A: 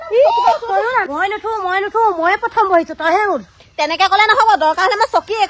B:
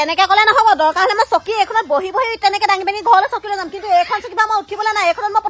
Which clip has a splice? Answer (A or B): A